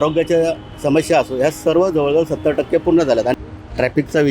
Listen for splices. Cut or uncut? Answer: cut